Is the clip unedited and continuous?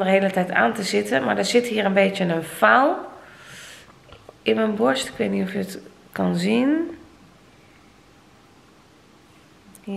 yes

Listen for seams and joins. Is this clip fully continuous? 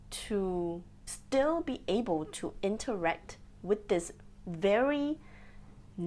yes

